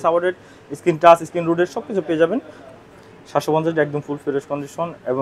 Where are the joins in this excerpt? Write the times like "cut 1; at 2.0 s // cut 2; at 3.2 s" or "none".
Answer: cut 1; at 2.7 s